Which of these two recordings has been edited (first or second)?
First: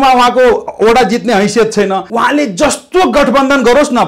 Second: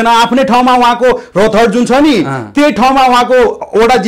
first